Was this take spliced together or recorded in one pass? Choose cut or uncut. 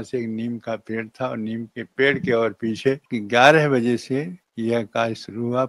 cut